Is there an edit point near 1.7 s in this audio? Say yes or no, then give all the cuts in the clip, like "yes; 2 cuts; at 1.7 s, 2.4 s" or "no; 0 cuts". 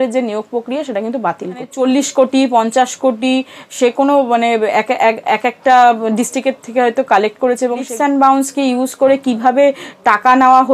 yes; 2 cuts; at 1.7 s, 7.9 s